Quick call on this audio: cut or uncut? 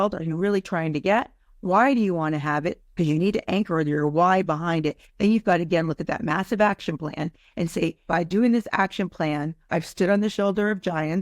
cut